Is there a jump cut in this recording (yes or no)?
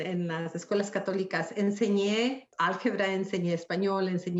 yes